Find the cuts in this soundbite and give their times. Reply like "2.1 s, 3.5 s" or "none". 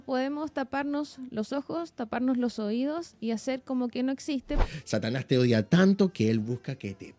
4.5 s

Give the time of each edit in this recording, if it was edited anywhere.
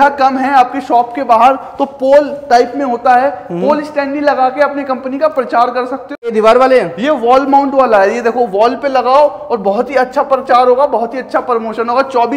6.3 s

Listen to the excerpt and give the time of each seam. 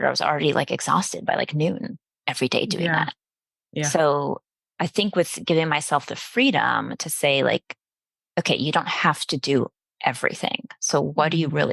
none

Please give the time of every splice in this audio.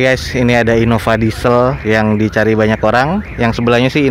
1.5 s

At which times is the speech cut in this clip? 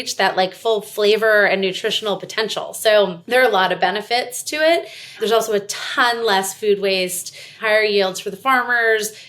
3.2 s, 5.2 s, 7.6 s

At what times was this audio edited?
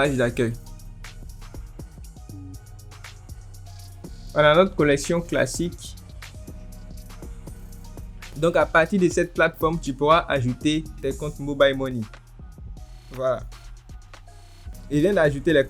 8.3 s, 14.7 s

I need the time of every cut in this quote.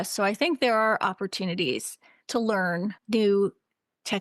3.0 s

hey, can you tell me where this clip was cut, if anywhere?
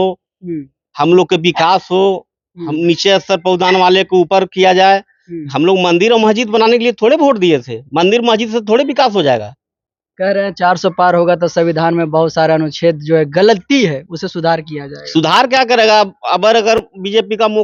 none

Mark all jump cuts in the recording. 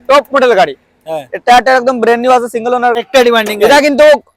2.9 s

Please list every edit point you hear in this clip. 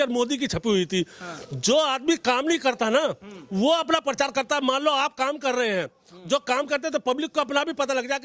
none

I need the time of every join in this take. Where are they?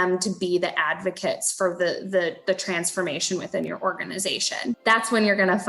4.8 s

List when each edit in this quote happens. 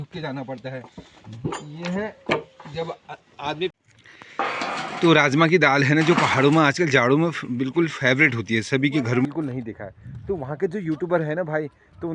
3.7 s, 9.2 s

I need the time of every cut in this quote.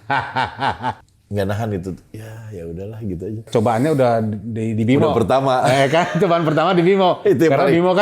1.0 s, 3.5 s

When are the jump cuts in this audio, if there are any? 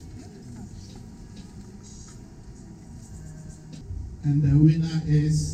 none

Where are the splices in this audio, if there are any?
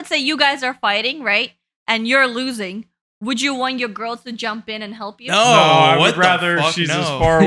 none

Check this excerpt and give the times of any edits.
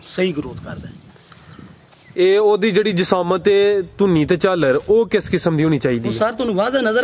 none

